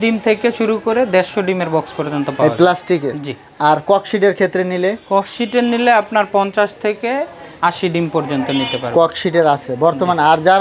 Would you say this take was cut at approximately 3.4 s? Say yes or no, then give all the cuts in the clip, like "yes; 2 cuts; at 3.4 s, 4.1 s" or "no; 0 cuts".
no; 0 cuts